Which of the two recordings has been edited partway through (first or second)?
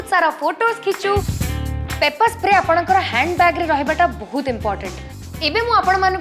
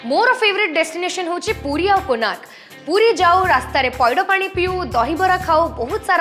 first